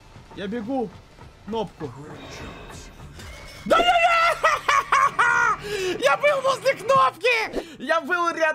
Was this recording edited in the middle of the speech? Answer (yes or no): no